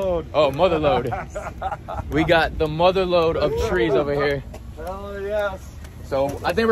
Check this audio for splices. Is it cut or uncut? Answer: uncut